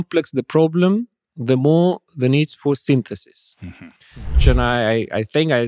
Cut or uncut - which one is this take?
cut